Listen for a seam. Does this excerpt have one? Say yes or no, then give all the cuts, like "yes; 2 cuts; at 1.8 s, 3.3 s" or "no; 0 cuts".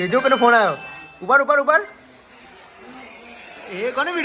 no; 0 cuts